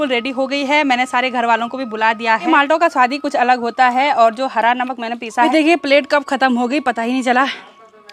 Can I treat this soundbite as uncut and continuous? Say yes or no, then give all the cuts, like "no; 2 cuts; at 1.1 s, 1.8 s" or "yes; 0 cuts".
no; 2 cuts; at 2.5 s, 5.5 s